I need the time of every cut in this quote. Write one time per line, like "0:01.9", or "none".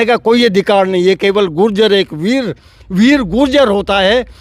none